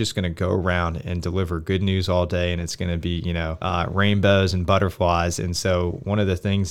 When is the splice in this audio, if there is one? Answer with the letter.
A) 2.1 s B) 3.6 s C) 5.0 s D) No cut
B